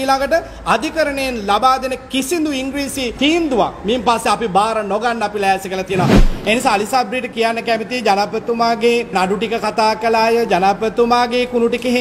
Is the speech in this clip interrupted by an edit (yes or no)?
yes